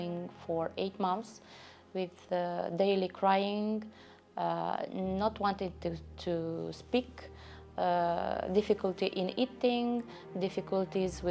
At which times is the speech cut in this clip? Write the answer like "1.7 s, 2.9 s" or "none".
none